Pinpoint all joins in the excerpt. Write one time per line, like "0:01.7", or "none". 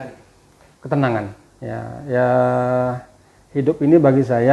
none